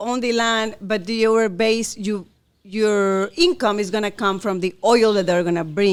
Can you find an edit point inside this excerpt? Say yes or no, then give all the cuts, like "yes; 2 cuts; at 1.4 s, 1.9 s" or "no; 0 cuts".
no; 0 cuts